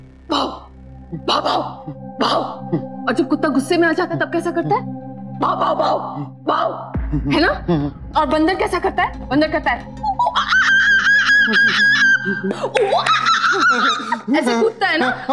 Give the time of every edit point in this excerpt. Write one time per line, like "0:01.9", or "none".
none